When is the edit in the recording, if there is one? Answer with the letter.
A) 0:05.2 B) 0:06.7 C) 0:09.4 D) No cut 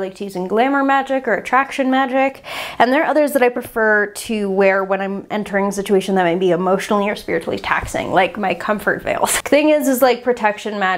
C